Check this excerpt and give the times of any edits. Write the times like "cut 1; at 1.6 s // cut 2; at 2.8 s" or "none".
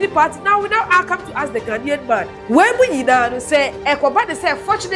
cut 1; at 2.4 s // cut 2; at 3.8 s